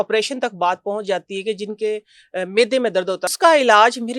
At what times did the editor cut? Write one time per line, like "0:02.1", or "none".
0:03.3